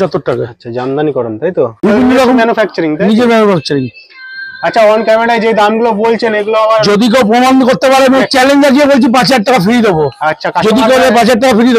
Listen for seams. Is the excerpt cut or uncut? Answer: cut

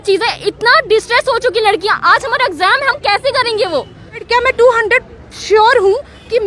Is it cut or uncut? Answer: cut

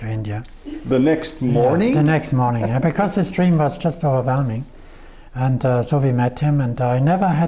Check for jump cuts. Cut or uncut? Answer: uncut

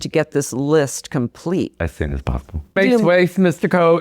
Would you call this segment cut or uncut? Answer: cut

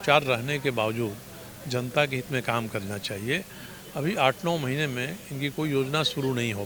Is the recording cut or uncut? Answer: uncut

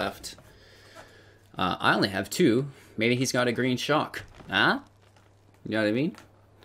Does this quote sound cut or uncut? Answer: uncut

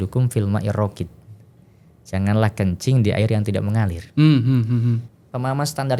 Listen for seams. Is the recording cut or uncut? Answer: cut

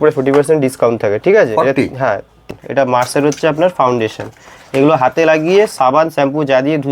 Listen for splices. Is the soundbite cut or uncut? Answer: cut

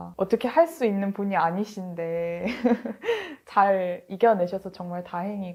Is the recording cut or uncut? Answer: uncut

